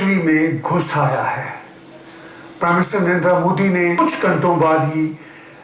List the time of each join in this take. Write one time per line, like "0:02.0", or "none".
0:04.0